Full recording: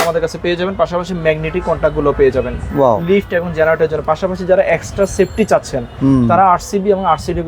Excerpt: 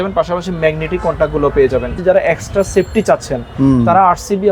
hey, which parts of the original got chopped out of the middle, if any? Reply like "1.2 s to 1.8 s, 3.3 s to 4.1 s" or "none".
2.6 s to 4.4 s